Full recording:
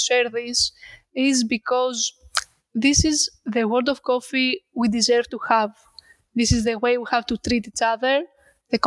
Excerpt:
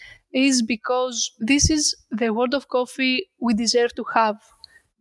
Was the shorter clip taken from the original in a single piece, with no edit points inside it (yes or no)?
no